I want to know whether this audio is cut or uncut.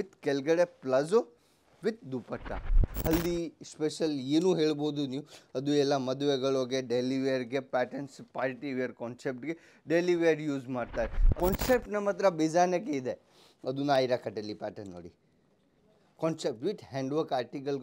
cut